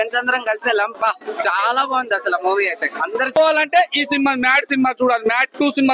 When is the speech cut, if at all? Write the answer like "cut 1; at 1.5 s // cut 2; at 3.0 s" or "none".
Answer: cut 1; at 3.4 s